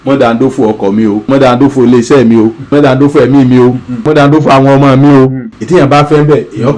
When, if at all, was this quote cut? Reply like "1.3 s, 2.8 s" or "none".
1.3 s, 2.7 s, 4.0 s